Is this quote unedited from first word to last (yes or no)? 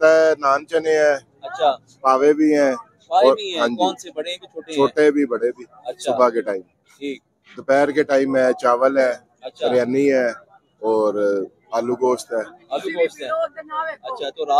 yes